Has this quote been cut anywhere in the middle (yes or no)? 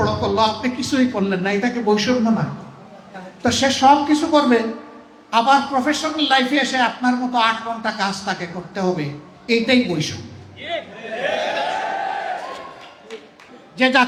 no